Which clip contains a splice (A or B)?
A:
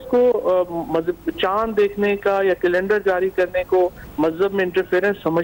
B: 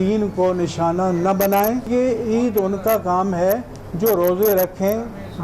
B